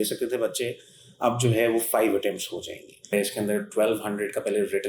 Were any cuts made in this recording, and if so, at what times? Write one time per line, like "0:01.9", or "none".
0:03.1